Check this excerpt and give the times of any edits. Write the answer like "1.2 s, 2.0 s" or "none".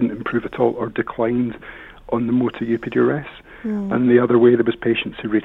none